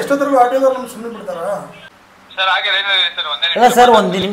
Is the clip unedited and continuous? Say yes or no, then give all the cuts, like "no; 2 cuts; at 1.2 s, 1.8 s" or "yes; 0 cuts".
no; 1 cut; at 2.3 s